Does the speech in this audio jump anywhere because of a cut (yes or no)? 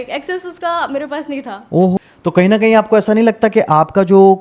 yes